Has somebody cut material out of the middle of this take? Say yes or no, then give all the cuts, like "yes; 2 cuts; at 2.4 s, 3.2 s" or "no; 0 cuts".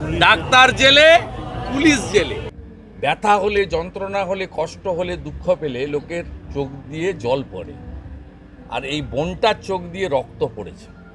yes; 1 cut; at 2.4 s